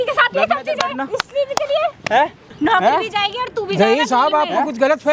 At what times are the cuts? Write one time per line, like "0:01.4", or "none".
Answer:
0:02.4